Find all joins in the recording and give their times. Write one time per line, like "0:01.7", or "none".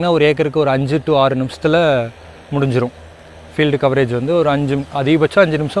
none